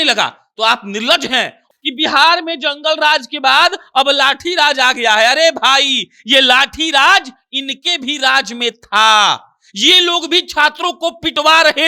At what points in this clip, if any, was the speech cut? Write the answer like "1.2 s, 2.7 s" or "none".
1.6 s